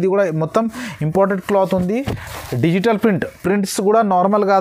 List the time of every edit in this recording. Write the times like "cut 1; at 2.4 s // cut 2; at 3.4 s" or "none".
none

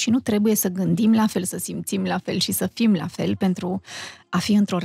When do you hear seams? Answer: none

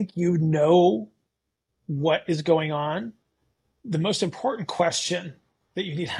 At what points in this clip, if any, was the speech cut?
none

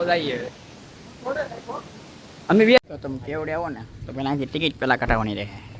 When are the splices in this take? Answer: cut 1; at 2.8 s

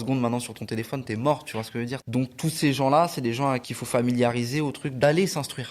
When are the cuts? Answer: cut 1; at 2.1 s // cut 2; at 3.7 s // cut 3; at 4.9 s

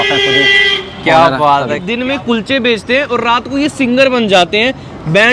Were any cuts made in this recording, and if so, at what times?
cut 1; at 1.9 s

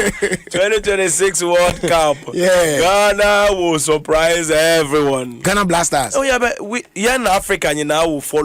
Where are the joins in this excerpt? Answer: cut 1; at 5.3 s

